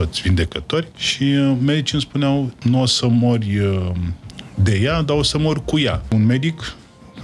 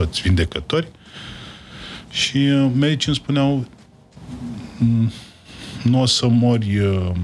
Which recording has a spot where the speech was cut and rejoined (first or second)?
first